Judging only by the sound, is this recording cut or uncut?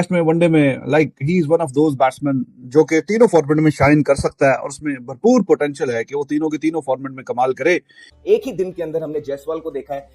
cut